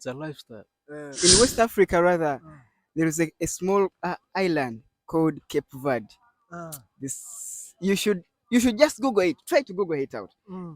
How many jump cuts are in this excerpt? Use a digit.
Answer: 1